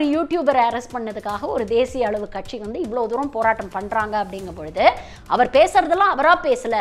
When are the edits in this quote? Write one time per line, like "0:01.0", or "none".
0:05.1